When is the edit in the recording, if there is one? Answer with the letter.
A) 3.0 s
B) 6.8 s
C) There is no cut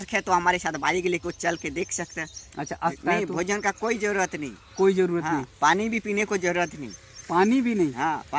A